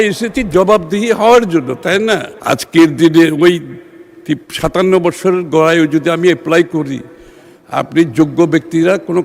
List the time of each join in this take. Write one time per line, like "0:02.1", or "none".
0:02.3